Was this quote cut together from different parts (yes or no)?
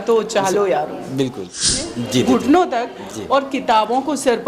yes